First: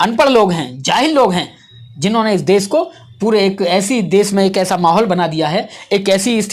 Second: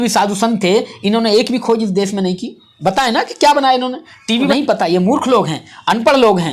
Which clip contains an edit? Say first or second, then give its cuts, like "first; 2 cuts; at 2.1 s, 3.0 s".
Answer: second; 1 cut; at 4.5 s